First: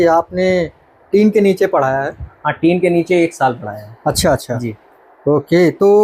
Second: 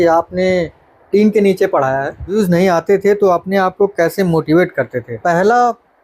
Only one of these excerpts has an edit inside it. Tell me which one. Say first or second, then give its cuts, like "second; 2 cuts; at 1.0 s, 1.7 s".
second; 2 cuts; at 2.3 s, 5.1 s